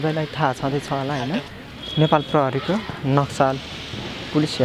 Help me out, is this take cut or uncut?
cut